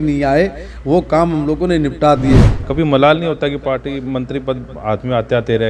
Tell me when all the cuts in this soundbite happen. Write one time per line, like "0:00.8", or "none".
0:02.5